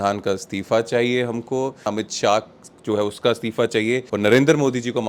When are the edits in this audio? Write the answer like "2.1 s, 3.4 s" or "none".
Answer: 1.9 s, 4.1 s